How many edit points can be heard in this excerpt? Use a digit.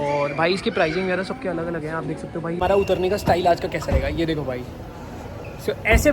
1